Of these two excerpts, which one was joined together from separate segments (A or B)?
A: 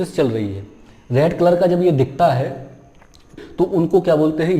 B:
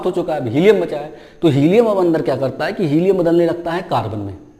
A